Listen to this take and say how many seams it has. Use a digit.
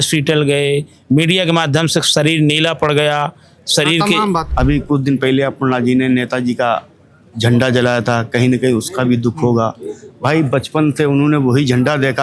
1